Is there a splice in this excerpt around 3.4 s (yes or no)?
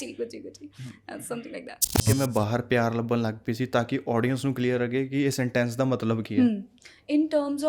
no